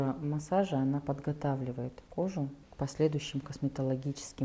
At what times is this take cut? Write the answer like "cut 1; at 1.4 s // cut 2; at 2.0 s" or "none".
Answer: cut 1; at 2.0 s // cut 2; at 2.6 s